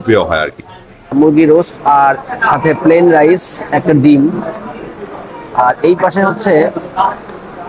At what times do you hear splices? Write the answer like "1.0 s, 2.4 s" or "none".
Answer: 1.1 s